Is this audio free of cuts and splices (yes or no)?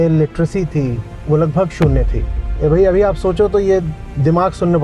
no